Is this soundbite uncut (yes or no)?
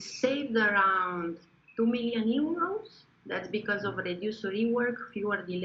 yes